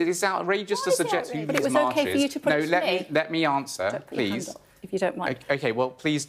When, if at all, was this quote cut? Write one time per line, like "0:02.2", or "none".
0:01.3